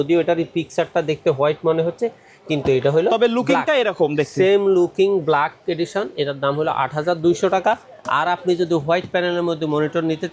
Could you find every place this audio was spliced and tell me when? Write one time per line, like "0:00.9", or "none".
none